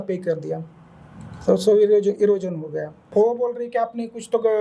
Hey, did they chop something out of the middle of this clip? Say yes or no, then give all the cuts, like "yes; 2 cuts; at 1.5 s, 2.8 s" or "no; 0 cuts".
yes; 1 cut; at 3.0 s